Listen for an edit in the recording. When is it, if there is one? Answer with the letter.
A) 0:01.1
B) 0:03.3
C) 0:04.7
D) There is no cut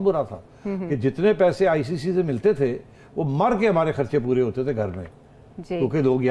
D